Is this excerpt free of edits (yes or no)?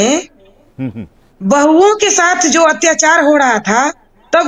yes